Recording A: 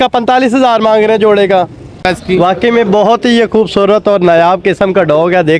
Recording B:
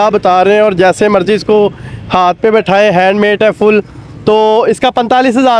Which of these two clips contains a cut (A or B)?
A